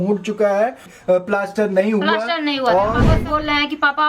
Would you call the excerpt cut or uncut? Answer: cut